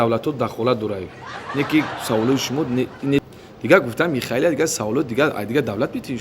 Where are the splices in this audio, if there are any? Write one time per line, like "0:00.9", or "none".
0:03.2